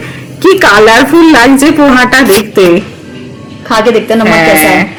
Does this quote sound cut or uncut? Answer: uncut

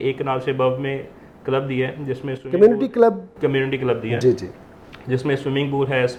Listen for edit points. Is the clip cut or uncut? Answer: uncut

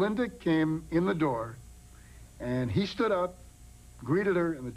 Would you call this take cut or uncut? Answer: cut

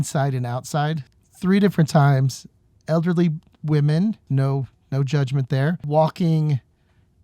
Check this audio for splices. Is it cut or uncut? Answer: cut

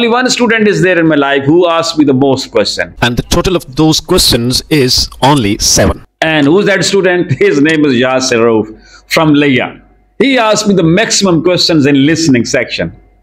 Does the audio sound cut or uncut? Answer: uncut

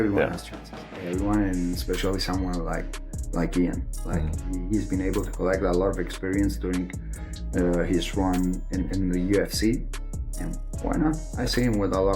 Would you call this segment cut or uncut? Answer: uncut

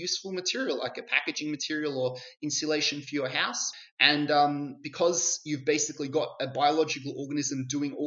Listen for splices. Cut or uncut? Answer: uncut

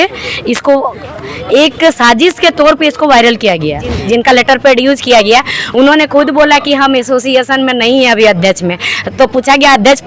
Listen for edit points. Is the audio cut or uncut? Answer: cut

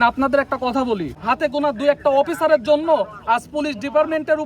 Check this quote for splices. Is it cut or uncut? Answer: cut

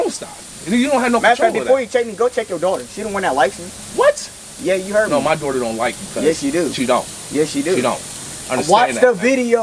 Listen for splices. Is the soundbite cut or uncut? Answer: uncut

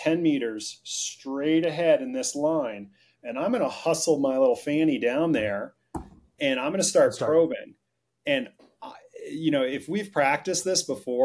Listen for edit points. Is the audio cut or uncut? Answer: uncut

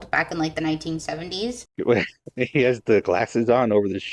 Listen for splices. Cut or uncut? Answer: cut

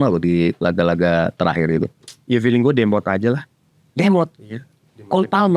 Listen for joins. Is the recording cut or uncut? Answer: cut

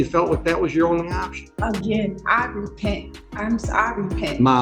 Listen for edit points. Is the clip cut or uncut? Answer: cut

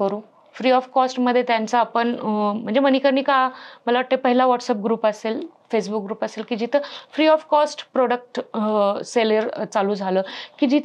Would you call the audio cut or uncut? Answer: uncut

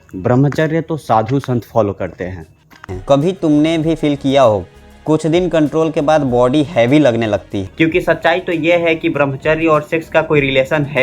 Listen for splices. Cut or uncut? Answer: cut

